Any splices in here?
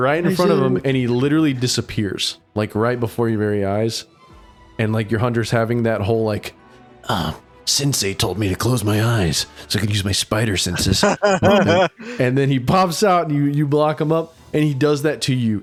no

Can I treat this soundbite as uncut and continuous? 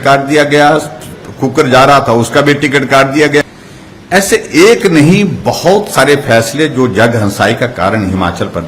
no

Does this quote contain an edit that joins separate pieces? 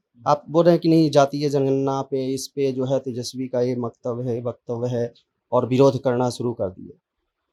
no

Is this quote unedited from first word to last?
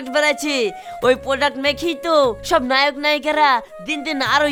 yes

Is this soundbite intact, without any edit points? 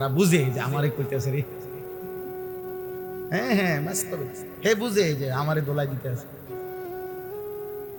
yes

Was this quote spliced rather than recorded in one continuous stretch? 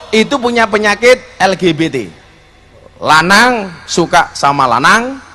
no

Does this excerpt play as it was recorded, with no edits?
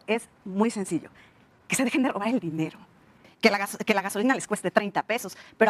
no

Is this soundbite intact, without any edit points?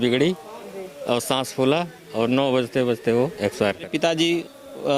no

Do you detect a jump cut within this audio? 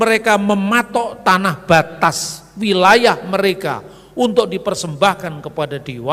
no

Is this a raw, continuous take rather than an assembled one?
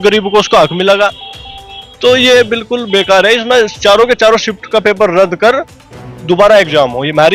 yes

